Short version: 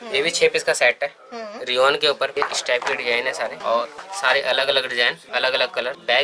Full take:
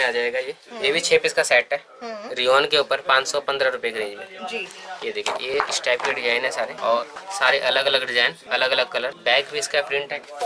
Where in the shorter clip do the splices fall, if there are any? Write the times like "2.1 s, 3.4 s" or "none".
2.3 s